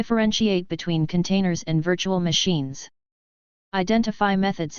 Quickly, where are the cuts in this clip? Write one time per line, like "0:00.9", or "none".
0:01.0